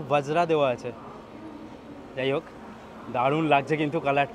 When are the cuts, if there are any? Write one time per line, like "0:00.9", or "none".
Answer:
none

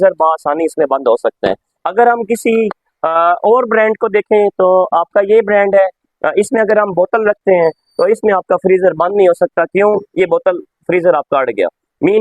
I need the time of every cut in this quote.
0:01.7

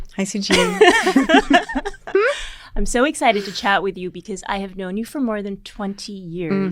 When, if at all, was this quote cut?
none

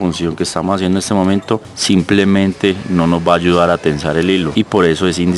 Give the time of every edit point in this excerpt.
0:01.7
0:04.5

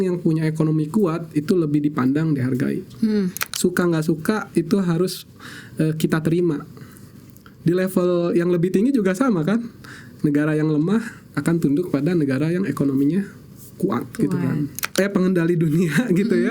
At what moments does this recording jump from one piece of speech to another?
0:03.4
0:14.8

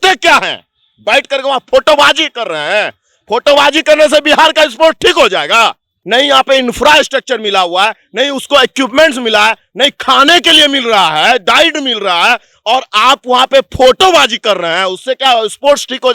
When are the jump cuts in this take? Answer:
0:06.0

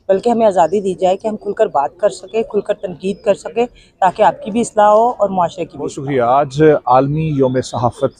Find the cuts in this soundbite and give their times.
0:06.0

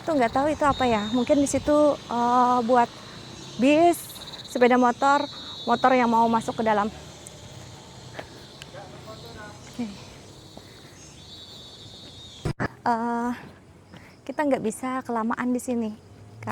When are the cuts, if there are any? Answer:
none

